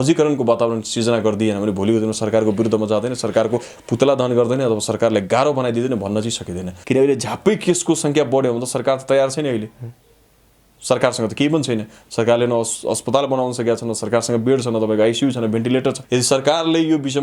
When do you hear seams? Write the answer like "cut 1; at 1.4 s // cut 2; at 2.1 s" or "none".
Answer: cut 1; at 6.7 s // cut 2; at 16.0 s